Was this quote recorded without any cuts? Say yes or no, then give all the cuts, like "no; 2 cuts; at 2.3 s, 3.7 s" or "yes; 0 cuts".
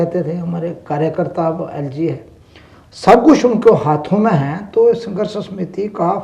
yes; 0 cuts